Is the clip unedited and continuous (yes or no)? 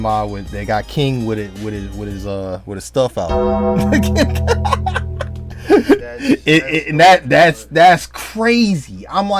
yes